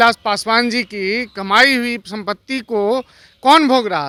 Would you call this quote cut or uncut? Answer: uncut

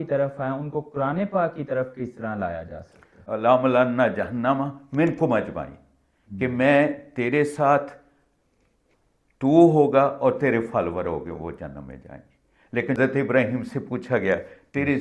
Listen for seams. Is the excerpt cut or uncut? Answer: cut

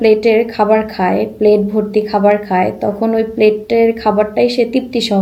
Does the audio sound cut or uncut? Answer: uncut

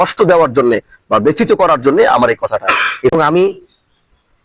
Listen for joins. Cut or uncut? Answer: cut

